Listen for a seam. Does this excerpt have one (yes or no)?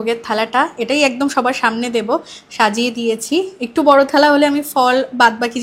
no